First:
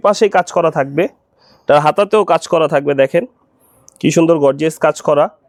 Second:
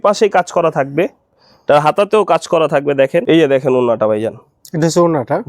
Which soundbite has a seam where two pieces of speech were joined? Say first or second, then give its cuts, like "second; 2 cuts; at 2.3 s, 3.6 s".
second; 1 cut; at 3.2 s